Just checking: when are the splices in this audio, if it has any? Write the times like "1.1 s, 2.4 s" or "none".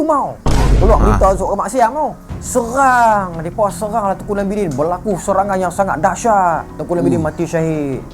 none